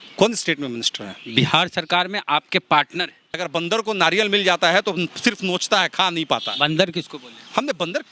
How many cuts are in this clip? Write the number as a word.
one